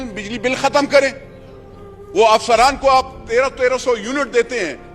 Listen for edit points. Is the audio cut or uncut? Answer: uncut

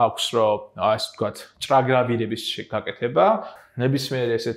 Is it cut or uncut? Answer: cut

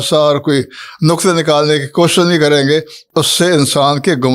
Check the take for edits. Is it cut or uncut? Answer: cut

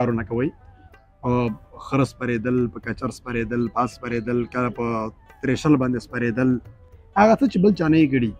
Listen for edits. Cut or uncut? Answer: uncut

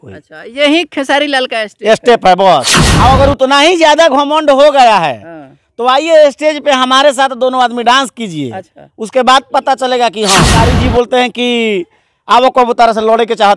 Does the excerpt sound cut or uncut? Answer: cut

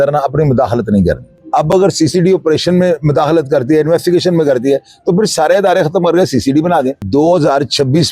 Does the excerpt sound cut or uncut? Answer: cut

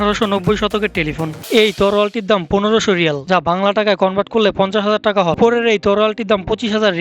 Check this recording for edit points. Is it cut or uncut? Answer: cut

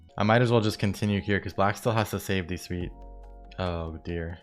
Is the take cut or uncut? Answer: uncut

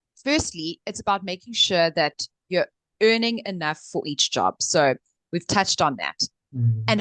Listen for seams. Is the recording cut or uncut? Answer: uncut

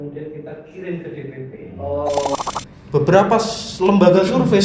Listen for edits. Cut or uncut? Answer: cut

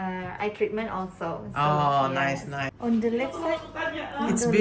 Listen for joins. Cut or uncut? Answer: cut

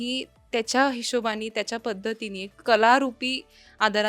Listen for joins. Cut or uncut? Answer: cut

